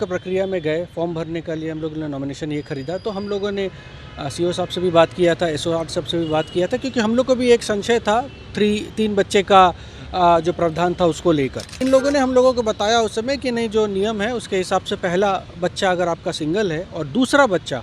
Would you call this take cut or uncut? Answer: cut